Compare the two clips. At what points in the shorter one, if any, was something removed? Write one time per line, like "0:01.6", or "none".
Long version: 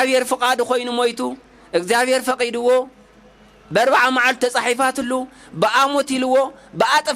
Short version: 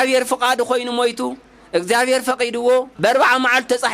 0:02.9